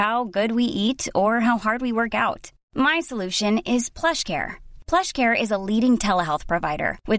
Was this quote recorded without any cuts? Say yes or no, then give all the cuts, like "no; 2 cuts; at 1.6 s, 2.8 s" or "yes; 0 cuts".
yes; 0 cuts